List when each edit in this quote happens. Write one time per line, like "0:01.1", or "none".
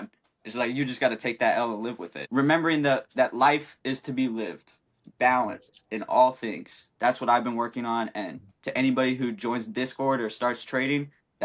0:02.1